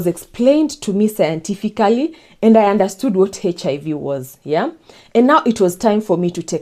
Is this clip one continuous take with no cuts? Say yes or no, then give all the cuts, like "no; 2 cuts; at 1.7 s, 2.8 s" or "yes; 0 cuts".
yes; 0 cuts